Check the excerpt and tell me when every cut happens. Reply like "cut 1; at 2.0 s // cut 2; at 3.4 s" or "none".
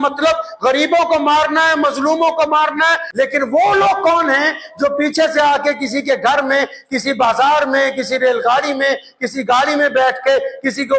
cut 1; at 3.0 s